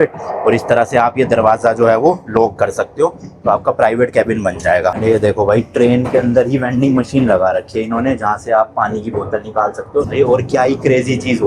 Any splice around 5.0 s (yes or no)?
yes